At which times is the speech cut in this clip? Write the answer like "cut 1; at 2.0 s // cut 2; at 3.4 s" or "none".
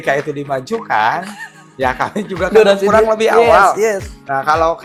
none